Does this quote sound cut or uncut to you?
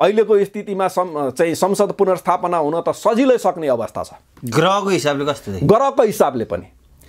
uncut